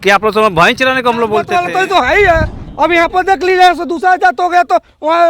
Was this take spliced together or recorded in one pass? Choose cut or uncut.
cut